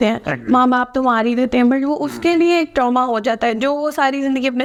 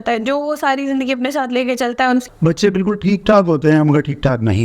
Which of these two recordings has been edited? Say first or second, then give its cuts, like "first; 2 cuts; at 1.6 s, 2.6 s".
second; 1 cut; at 2.2 s